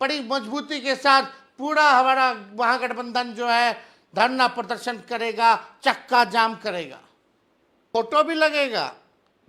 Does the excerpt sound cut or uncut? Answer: cut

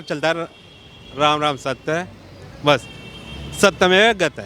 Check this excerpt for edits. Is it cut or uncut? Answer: uncut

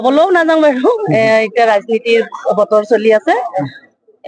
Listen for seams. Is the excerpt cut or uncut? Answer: cut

